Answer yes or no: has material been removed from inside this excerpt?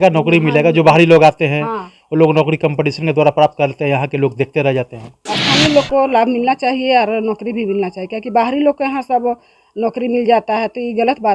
no